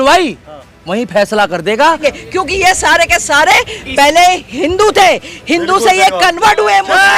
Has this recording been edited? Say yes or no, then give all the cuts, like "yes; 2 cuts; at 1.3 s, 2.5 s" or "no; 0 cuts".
no; 0 cuts